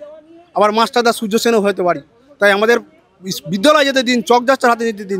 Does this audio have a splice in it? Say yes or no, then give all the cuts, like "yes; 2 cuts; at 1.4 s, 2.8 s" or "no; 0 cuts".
no; 0 cuts